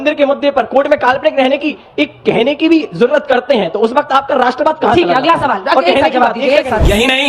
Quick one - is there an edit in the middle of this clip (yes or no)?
no